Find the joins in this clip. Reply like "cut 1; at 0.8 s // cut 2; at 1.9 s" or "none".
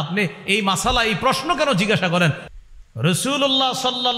cut 1; at 2.4 s